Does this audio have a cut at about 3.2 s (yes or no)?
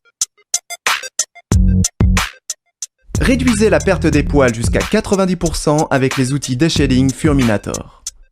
yes